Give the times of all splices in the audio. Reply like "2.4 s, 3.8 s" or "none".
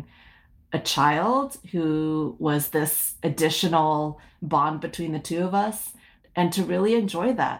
6.2 s

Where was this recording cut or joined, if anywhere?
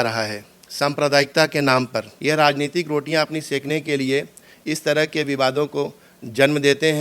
2.0 s

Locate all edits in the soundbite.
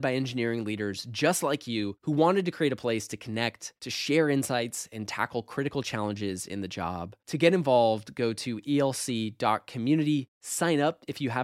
none

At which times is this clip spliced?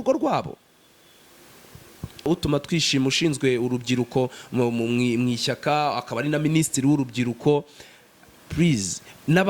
2.3 s

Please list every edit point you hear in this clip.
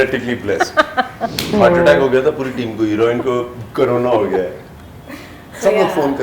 1.6 s

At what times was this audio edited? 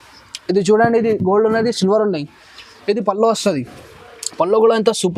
none

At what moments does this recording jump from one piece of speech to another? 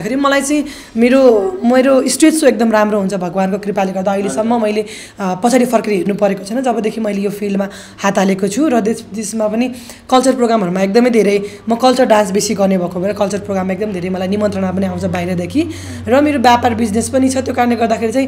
none

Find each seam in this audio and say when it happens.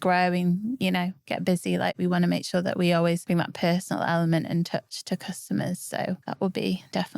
3.2 s, 6.3 s

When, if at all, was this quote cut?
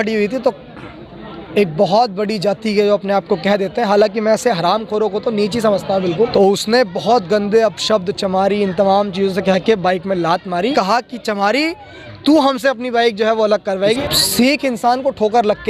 6.3 s, 10.7 s, 14.0 s

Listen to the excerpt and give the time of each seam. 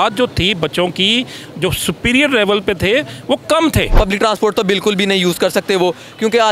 3.9 s

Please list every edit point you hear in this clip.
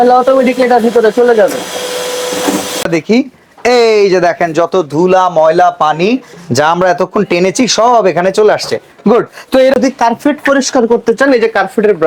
2.9 s, 9.7 s

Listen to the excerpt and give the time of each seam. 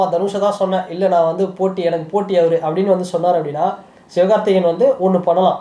none

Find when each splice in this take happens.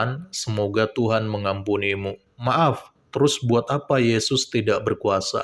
2.3 s

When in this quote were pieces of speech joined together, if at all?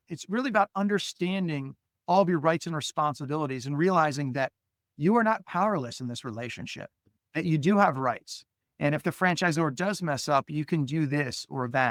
none

